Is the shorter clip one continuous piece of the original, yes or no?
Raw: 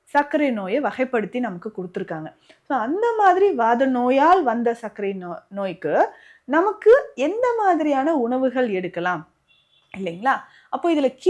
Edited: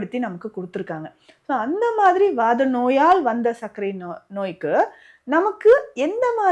yes